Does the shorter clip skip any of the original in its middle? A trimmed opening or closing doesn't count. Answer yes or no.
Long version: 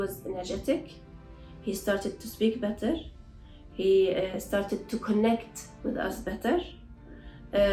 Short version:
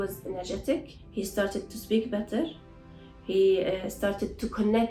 yes